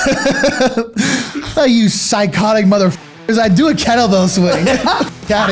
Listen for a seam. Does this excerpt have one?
no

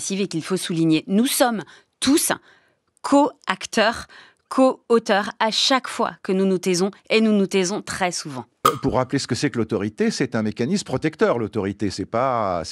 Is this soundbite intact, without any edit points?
no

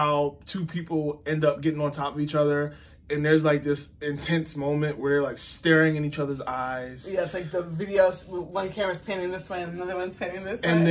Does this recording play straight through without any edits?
yes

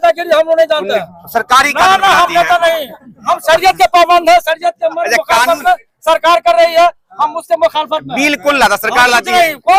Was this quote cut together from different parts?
no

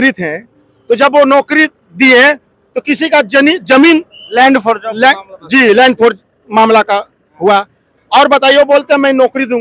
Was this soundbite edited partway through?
no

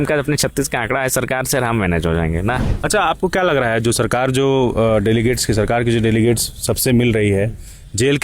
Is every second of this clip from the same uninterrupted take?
no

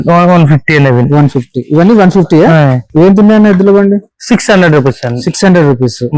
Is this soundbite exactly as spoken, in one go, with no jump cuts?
no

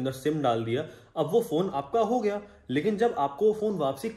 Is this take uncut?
yes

